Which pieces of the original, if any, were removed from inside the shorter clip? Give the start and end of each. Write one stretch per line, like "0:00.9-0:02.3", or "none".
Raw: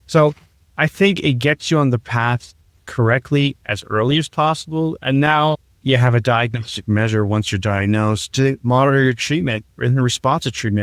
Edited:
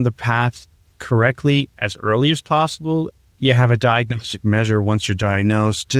0:05.0-0:05.6